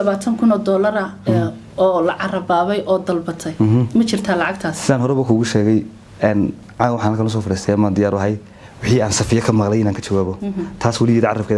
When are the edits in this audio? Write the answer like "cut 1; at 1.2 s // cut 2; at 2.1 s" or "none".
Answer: none